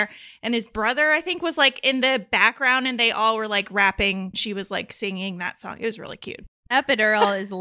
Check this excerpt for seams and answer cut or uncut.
cut